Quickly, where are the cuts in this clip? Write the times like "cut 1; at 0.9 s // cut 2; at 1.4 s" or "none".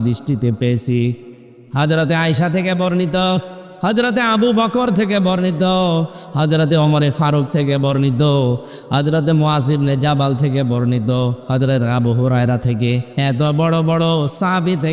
none